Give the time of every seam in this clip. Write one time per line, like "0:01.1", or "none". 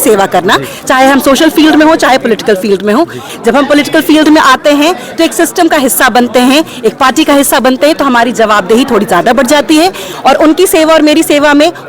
0:03.3
0:10.1